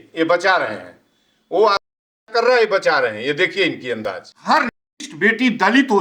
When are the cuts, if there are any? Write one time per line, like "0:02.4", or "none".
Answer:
0:04.3